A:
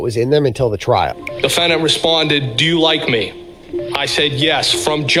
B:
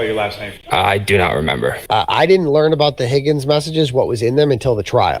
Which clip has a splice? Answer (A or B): B